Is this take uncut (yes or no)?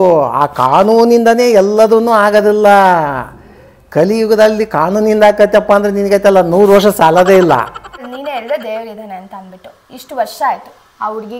no